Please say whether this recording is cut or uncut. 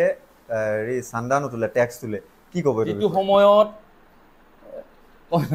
cut